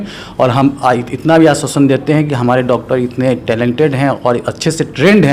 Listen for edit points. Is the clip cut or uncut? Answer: uncut